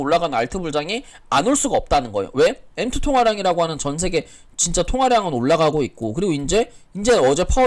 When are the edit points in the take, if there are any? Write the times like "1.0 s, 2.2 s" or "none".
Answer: none